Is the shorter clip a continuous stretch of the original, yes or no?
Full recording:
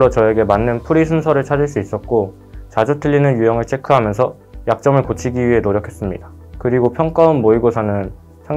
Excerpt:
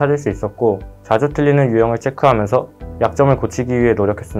no